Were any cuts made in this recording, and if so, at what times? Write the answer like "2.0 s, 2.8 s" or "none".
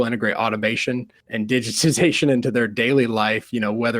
1.2 s